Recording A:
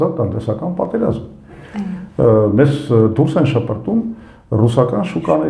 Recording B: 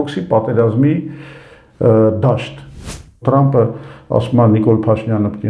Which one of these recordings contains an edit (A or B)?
B